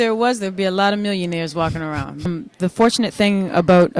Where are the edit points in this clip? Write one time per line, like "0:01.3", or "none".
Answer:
0:02.3